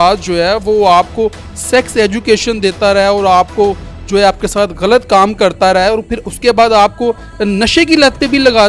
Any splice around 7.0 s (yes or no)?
no